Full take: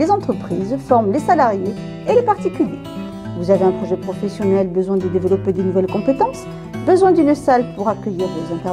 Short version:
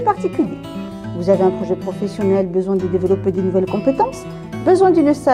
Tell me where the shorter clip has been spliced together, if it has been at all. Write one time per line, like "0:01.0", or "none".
none